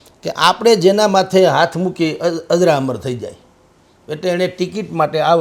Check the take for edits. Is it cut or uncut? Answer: uncut